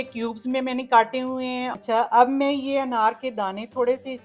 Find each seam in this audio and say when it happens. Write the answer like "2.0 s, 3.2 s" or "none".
1.7 s